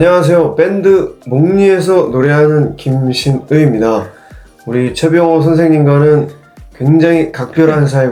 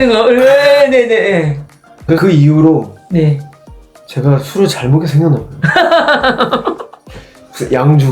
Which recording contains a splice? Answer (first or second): second